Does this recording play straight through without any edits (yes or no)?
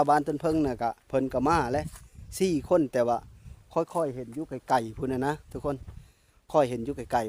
yes